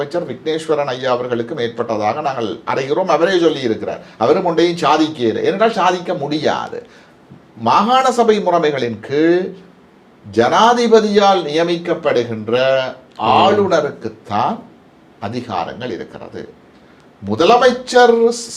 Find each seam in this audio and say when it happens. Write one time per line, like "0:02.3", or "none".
none